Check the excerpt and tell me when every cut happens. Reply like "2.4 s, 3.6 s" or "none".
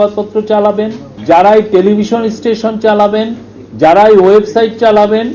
1.1 s